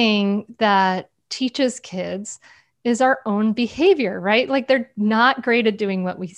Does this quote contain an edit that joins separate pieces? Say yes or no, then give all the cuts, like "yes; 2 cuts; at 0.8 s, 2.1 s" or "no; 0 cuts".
no; 0 cuts